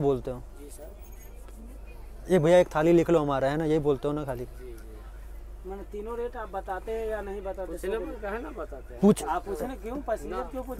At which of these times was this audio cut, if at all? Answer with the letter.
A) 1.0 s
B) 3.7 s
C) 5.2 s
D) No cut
D